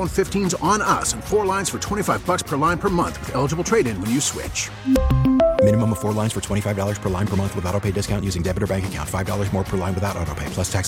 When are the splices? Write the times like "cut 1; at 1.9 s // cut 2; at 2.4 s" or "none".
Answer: none